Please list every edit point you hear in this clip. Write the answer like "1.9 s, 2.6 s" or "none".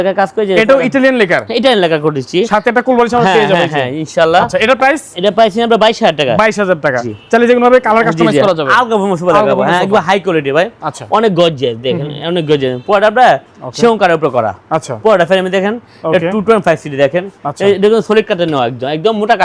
none